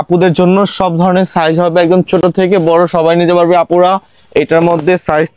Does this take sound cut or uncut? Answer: uncut